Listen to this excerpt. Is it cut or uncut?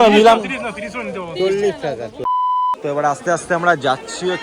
cut